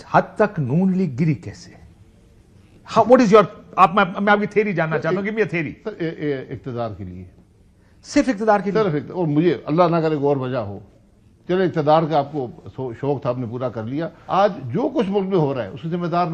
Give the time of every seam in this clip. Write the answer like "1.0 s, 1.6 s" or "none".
14.2 s